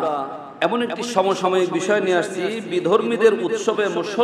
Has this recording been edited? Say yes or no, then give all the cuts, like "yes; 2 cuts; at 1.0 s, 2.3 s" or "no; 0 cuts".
no; 0 cuts